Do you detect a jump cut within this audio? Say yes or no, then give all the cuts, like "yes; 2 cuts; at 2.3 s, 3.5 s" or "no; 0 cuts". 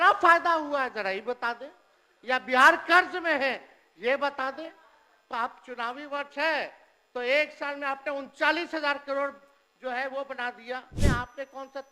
yes; 1 cut; at 10.9 s